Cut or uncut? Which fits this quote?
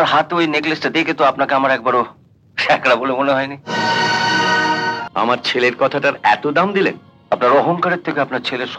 cut